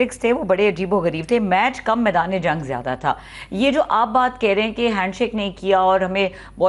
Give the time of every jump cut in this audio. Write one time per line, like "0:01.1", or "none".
none